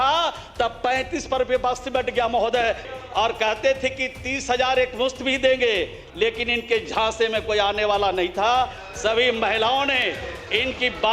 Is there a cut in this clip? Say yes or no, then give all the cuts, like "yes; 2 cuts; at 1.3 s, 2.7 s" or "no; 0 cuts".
yes; 1 cut; at 2.9 s